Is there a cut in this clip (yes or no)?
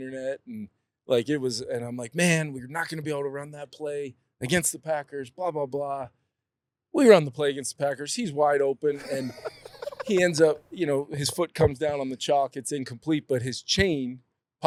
no